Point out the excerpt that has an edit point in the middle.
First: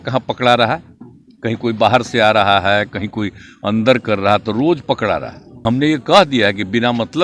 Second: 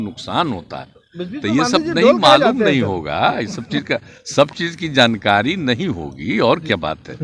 first; 1 cut; at 5.5 s

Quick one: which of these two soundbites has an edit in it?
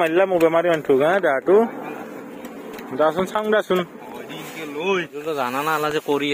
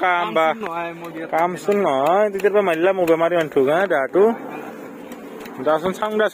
first; 1 cut; at 5.1 s

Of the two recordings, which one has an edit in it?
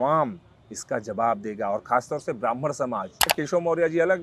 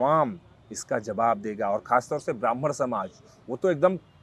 first; 1 cut; at 3.3 s

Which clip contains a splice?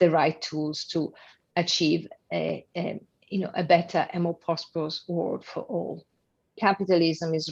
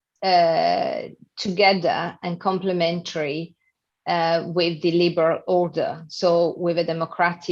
first; 1 cut; at 6.6 s

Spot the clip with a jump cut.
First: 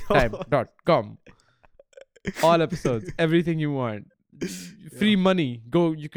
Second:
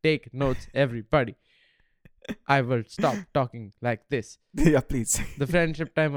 second; 1 cut; at 4.4 s

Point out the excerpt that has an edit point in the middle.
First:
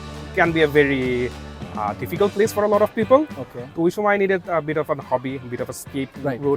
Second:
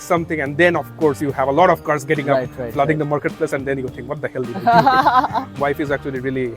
second; 1 cut; at 5.5 s

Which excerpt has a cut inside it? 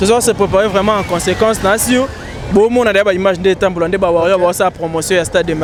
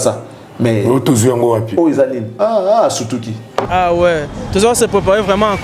second; 1 cut; at 3.6 s

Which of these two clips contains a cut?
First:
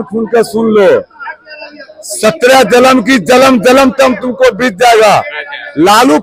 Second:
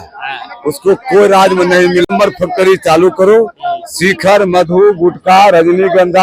second; 1 cut; at 2.1 s

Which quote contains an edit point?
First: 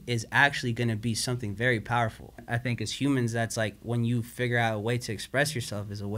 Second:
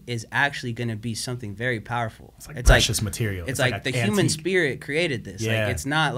first; 1 cut; at 2.4 s

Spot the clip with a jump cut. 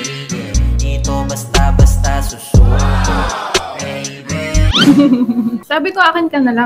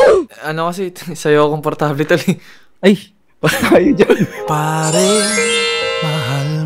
first; 1 cut; at 4.8 s

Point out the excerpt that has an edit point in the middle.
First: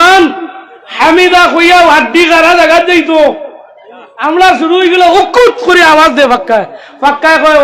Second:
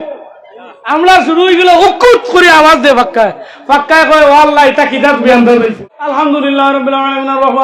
second; 1 cut; at 5.8 s

